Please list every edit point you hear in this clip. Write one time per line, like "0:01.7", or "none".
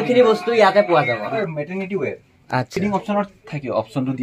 0:01.3
0:02.7